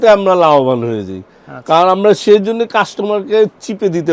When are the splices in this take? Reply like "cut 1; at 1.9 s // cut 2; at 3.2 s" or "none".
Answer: none